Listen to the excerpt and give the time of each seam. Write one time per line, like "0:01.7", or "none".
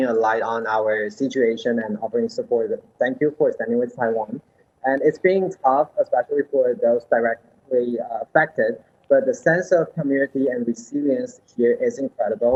none